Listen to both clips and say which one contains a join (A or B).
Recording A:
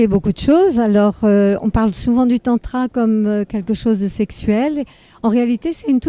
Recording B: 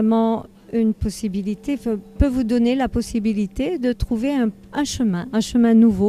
A